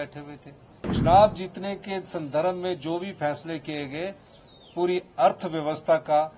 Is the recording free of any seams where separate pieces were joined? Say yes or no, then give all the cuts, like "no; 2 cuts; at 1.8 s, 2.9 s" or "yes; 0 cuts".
no; 1 cut; at 0.9 s